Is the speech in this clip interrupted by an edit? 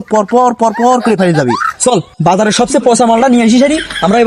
yes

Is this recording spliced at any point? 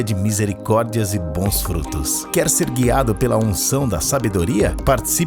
no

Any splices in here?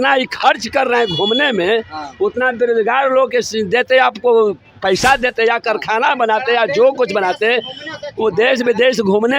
no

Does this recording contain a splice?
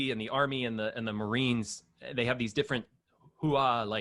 no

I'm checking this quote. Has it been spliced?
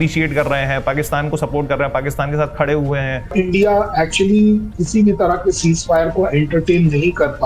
yes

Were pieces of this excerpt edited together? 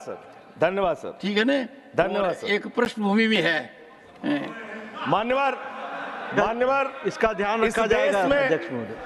no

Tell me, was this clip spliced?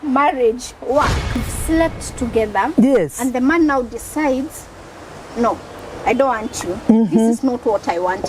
yes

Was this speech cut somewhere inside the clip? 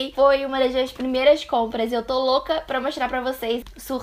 no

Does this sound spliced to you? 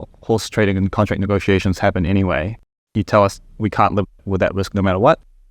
no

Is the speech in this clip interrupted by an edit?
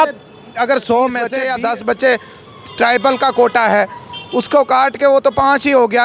yes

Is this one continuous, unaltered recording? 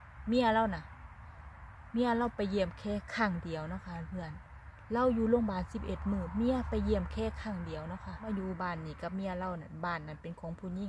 no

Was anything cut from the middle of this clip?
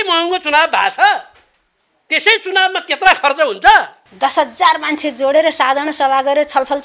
yes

